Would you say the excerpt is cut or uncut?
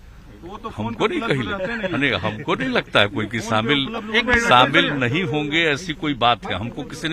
uncut